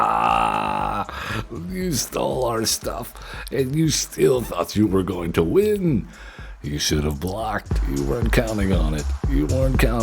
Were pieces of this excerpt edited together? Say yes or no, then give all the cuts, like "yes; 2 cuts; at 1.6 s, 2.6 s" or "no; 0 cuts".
yes; 1 cut; at 7.7 s